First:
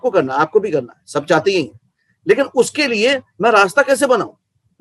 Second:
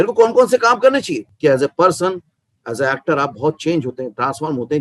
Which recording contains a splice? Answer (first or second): second